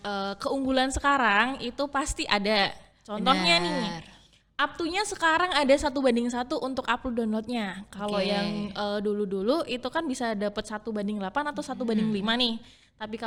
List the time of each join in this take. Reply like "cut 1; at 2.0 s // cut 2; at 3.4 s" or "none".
none